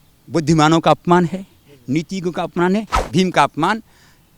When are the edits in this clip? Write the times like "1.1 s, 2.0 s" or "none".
2.9 s